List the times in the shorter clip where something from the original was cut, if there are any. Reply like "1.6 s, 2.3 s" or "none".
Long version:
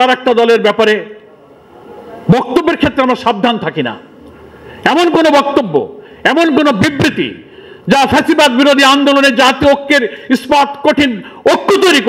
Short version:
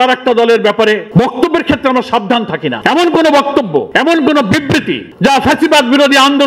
1.0 s, 2.8 s, 3.9 s, 5.0 s